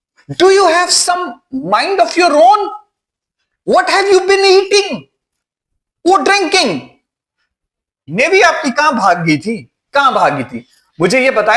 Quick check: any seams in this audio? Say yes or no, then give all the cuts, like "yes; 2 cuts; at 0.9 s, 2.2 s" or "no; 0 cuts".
yes; 1 cut; at 8.1 s